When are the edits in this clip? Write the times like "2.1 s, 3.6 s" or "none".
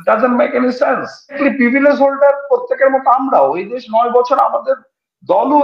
1.4 s